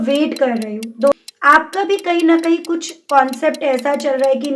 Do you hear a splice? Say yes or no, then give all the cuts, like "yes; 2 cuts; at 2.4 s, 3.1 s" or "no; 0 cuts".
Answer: yes; 1 cut; at 1.1 s